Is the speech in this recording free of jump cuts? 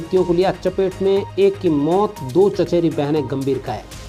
yes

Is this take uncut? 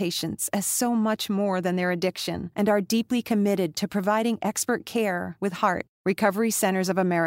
yes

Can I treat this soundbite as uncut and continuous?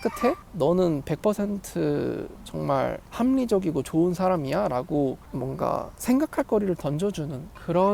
yes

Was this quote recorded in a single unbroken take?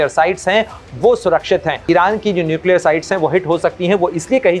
no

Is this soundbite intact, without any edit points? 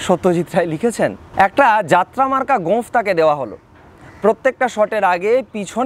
no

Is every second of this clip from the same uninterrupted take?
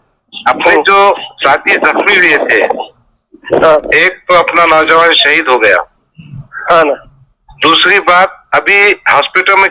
yes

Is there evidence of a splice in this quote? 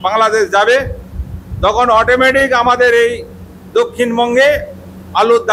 no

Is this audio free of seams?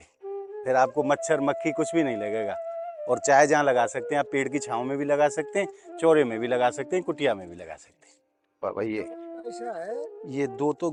yes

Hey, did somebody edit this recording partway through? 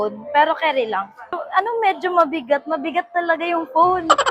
no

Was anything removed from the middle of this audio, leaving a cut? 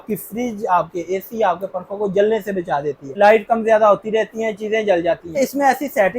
yes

